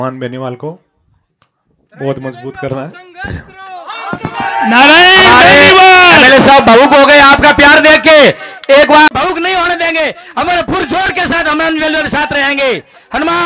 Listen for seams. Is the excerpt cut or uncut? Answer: uncut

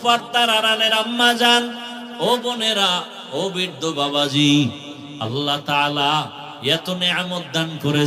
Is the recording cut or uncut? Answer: uncut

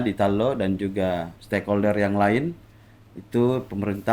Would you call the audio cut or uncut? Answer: cut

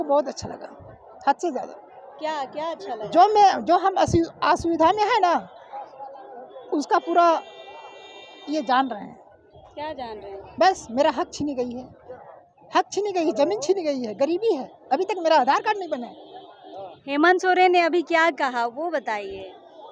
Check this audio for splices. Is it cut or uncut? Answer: uncut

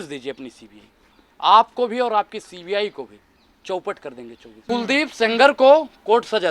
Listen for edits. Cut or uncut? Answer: cut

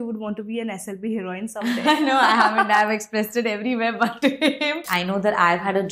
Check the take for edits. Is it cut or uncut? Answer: cut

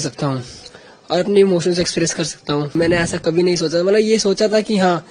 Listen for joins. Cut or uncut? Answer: cut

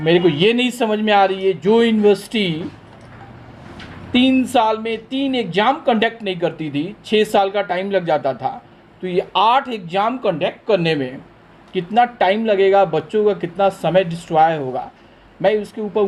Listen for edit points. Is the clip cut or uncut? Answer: uncut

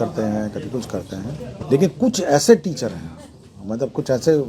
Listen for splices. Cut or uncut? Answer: cut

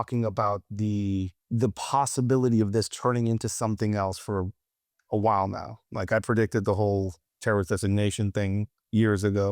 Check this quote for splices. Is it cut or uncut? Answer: cut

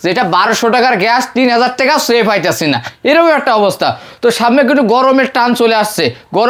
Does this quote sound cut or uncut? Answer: uncut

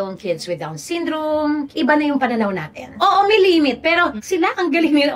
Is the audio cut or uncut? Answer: cut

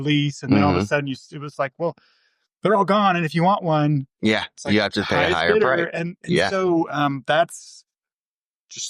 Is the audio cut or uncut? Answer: uncut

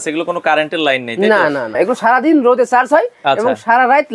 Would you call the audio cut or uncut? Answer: cut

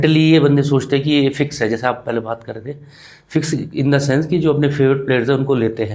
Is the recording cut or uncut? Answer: uncut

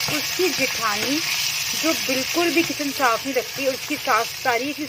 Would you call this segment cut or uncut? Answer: uncut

